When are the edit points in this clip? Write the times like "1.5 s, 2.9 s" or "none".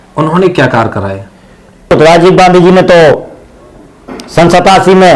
1.9 s